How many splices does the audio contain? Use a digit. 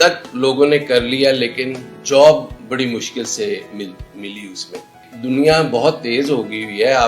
2